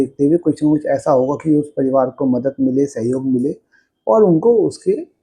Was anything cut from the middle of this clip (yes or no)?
no